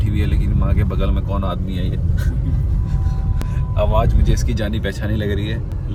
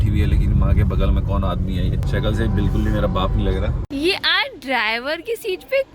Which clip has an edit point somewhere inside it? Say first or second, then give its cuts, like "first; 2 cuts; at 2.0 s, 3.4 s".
second; 2 cuts; at 2.1 s, 3.8 s